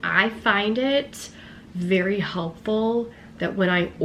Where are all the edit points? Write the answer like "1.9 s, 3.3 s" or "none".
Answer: none

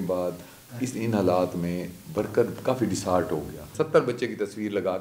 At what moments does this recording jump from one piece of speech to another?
3.6 s

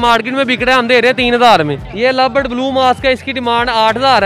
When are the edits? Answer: 1.8 s

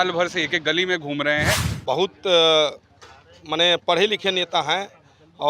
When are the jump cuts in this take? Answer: 1.7 s

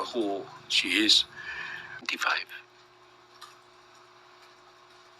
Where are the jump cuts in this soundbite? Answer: 2.1 s

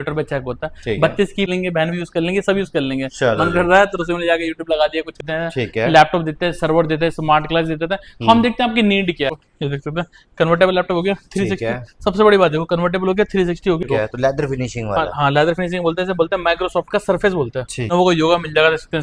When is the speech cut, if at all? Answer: 1.5 s, 5.2 s, 9.4 s, 13.9 s, 17.9 s

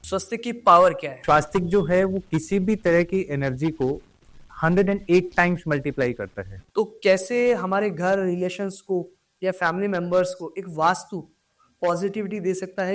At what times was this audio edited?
1.1 s, 6.6 s

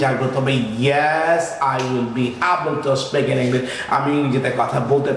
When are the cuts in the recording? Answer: none

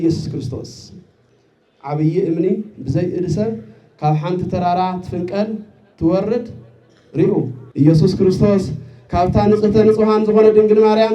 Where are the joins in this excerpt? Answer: 7.6 s

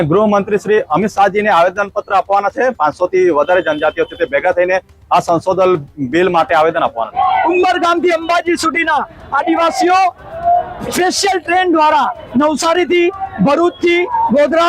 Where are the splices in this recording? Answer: 2.8 s, 7.1 s

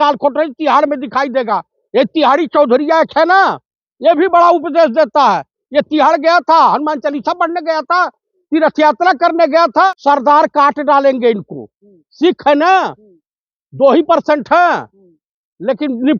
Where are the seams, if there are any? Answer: 9.9 s

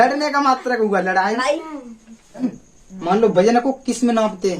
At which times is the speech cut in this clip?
2.4 s

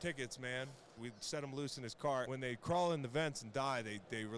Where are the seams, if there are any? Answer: 1.0 s, 2.3 s

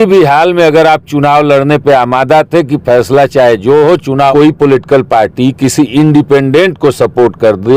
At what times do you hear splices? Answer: 4.3 s

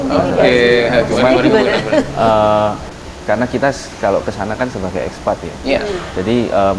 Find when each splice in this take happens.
2.8 s

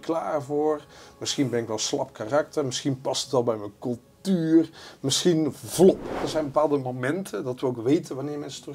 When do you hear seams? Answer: 6.2 s

